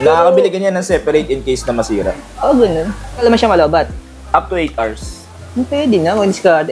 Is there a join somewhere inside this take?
yes; 1 cut; at 3.2 s

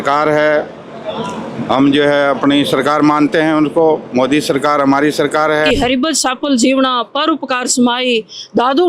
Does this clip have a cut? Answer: yes; 1 cut; at 5.7 s

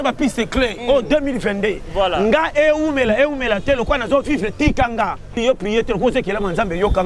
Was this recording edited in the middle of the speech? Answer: yes; 1 cut; at 5.3 s

